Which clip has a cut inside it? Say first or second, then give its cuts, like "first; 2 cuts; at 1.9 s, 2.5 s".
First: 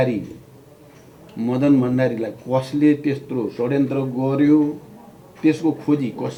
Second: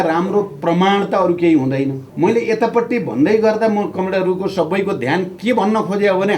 second; 1 cut; at 2.0 s